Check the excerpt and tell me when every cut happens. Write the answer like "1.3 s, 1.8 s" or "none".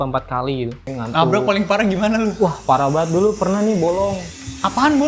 0.9 s